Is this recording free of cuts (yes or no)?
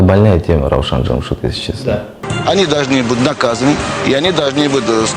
no